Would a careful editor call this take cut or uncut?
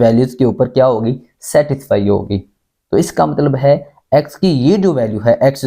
uncut